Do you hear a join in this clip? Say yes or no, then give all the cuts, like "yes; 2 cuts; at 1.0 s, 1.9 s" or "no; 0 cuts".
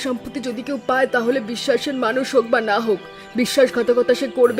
no; 0 cuts